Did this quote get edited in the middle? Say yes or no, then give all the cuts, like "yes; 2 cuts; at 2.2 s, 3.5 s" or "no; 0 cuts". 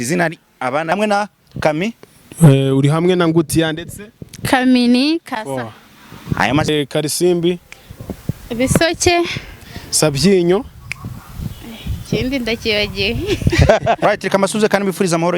yes; 3 cuts; at 0.9 s, 6.7 s, 14.0 s